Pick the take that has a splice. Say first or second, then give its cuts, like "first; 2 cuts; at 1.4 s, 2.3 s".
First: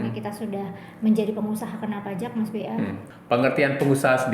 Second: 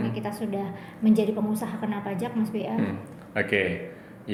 first; 1 cut; at 3.1 s